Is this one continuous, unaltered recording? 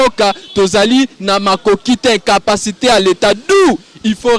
yes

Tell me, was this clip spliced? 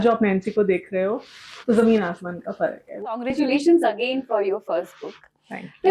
yes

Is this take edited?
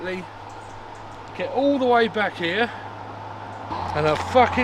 yes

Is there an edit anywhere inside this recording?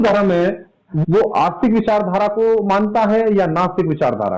yes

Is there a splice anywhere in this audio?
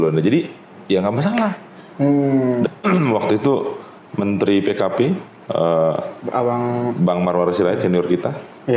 yes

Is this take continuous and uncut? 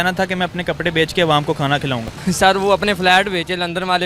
no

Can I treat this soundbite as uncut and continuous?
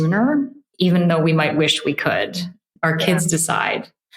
no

